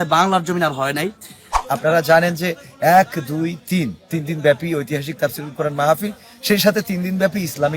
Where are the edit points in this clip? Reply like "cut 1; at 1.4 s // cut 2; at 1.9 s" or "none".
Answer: cut 1; at 1.5 s